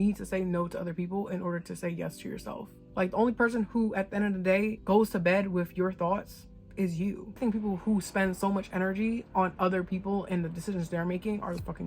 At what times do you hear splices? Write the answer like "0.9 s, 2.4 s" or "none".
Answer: 2.7 s, 7.4 s